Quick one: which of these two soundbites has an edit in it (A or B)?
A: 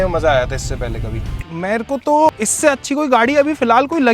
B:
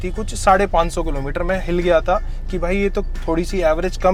A